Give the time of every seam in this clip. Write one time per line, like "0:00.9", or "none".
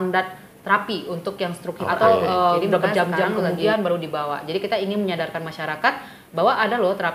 0:01.8